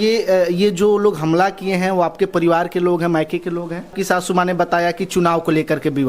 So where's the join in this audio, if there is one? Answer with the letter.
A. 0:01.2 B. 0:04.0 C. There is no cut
B